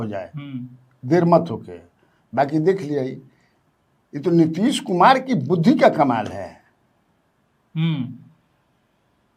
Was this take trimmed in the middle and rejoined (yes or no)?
no